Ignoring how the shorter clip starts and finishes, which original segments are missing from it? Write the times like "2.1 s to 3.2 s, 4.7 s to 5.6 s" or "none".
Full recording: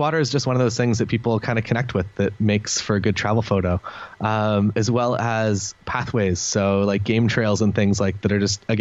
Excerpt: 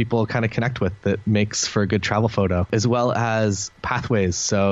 3.8 s to 4.7 s